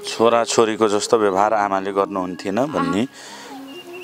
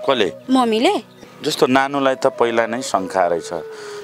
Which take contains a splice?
second; 1 cut; at 1.2 s

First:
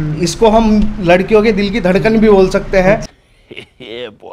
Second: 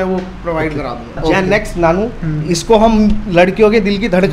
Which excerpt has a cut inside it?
second; 1 cut; at 1.2 s

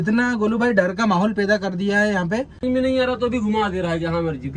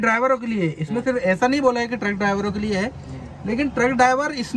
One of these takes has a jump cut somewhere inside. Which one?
first; 1 cut; at 2.6 s

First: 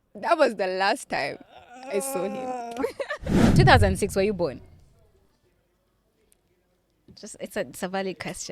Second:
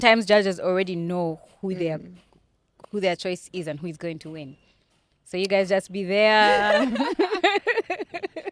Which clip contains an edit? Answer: first; 1 cut; at 3.4 s

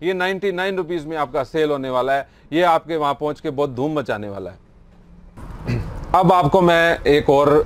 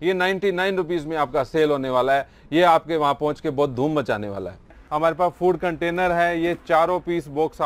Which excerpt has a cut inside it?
second; 1 cut; at 4.8 s

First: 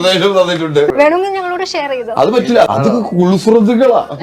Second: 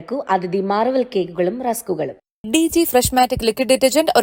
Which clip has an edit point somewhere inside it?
first; 2 cuts; at 0.9 s, 2.7 s

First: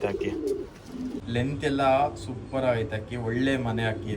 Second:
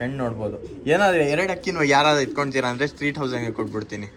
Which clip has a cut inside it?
first; 1 cut; at 1.2 s

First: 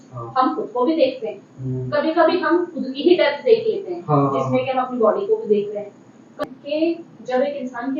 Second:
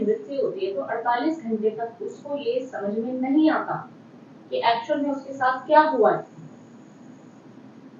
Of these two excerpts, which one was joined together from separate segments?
first; 1 cut; at 6.4 s

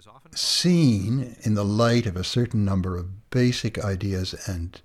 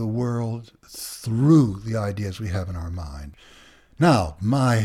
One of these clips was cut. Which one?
second; 1 cut; at 3.2 s

